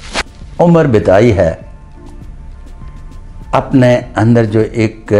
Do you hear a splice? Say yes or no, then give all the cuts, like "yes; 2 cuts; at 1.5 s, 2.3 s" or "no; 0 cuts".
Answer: no; 0 cuts